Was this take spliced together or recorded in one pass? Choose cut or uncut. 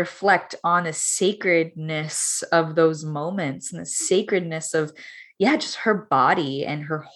uncut